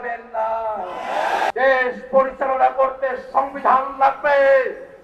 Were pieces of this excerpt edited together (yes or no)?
yes